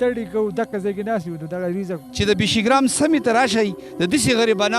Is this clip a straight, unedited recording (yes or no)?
no